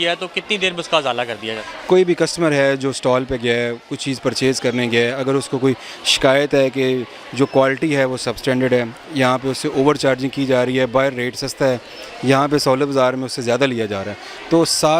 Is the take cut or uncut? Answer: uncut